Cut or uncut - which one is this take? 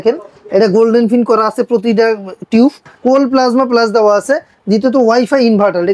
cut